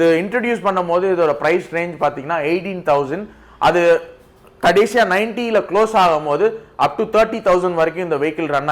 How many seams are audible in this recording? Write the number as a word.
zero